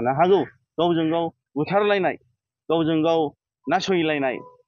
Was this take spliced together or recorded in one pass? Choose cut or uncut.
uncut